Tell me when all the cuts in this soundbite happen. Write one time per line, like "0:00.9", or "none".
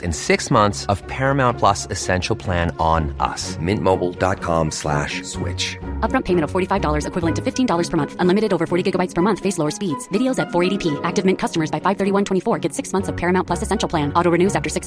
none